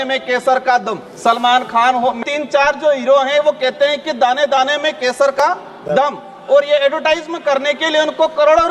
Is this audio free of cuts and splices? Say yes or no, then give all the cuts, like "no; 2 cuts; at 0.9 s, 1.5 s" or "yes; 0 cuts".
no; 2 cuts; at 1.0 s, 2.2 s